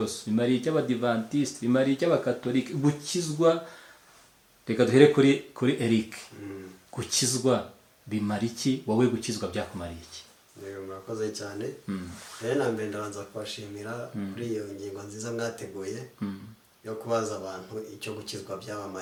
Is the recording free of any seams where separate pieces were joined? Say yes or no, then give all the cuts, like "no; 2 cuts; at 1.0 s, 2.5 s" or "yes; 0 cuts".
yes; 0 cuts